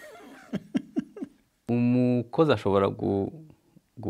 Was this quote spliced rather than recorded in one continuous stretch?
yes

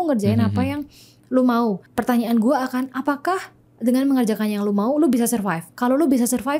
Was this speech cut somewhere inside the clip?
no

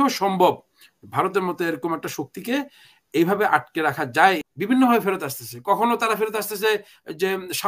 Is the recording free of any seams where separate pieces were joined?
no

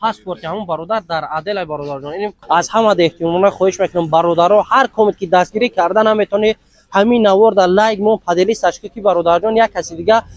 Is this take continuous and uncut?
no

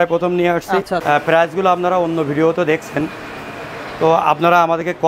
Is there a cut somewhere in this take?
yes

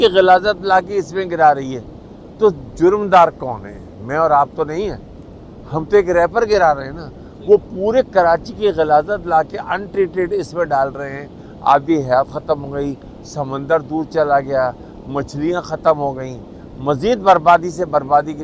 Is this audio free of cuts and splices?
yes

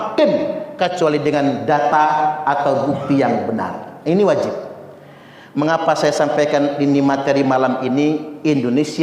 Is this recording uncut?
yes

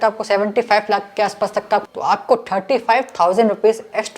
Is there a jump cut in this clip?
yes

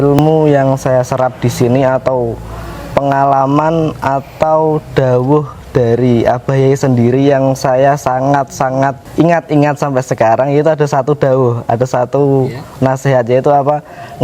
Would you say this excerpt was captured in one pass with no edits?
no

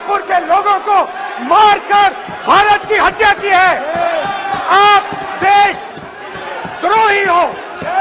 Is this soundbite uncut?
yes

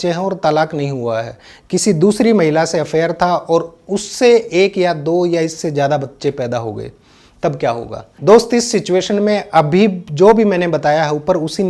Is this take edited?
no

